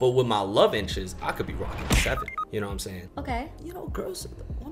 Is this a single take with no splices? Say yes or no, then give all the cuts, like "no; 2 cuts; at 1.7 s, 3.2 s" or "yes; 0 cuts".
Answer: no; 1 cut; at 3.6 s